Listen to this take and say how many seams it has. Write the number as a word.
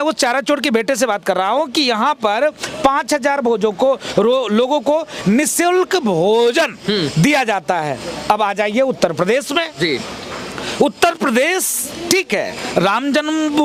zero